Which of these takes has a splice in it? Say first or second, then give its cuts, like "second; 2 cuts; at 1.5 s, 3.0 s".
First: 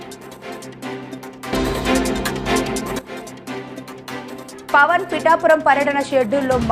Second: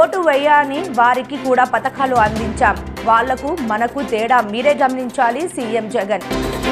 first; 1 cut; at 0.9 s